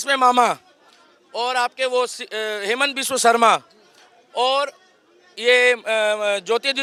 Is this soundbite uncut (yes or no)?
yes